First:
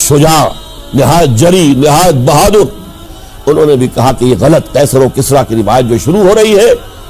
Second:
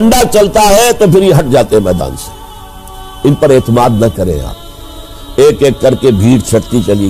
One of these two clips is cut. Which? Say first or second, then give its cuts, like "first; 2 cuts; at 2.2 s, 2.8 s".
second; 1 cut; at 5.1 s